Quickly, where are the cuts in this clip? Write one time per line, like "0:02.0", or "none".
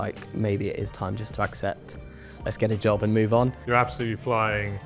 0:03.6